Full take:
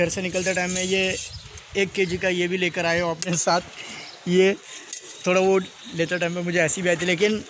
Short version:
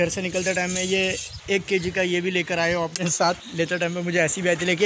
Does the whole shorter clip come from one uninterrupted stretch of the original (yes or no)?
no